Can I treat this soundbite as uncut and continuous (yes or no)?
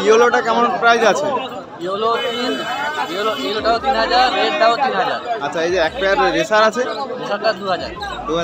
yes